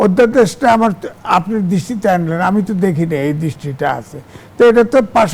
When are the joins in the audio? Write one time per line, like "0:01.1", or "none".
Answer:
none